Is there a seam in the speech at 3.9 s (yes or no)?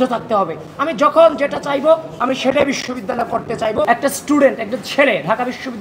yes